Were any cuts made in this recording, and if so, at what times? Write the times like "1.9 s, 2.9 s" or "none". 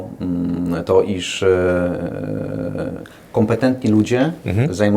none